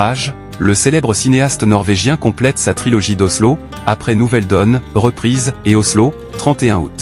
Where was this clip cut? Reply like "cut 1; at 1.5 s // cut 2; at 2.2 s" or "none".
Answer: none

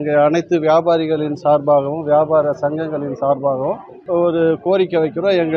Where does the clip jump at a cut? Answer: cut 1; at 3.9 s

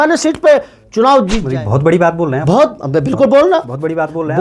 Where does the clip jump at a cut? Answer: cut 1; at 1.5 s

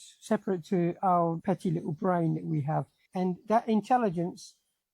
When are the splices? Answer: cut 1; at 1.4 s // cut 2; at 3.0 s

